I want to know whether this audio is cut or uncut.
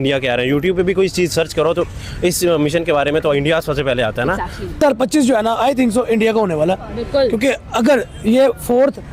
cut